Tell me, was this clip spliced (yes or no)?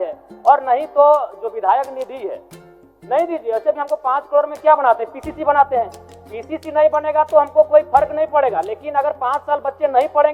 no